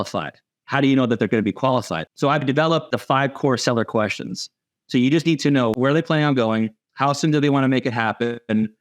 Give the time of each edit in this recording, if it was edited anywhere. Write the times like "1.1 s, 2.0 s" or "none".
2.0 s, 3.0 s, 5.8 s